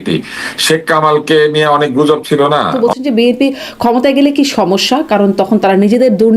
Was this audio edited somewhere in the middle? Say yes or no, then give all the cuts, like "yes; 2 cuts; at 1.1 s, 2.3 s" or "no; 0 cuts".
yes; 1 cut; at 2.7 s